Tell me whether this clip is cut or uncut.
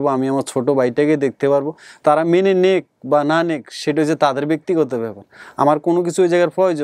uncut